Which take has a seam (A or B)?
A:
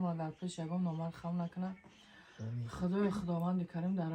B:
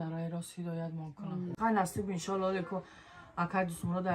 B